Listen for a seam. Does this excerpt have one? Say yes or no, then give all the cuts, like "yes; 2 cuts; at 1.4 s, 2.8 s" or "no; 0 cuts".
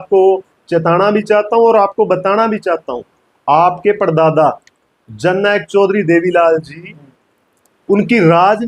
no; 0 cuts